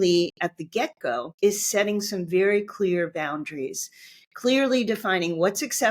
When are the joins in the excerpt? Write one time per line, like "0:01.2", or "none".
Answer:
0:01.3